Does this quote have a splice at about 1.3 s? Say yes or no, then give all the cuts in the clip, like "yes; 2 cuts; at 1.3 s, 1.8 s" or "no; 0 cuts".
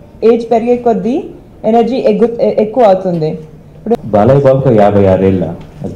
no; 1 cut; at 4.0 s